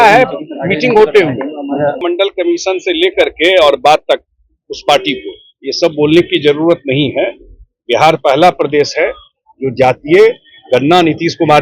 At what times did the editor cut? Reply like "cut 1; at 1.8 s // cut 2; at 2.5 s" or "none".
cut 1; at 2.0 s